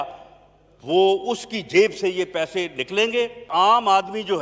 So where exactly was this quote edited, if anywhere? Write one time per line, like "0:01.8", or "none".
0:03.5